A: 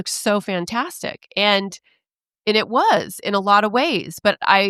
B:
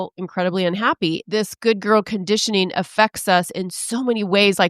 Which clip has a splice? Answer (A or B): B